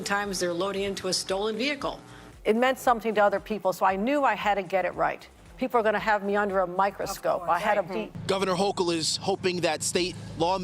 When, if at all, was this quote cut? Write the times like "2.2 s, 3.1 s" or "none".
2.3 s, 8.1 s